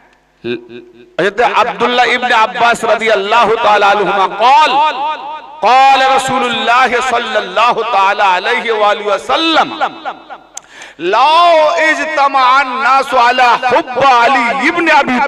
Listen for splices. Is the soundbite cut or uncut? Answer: uncut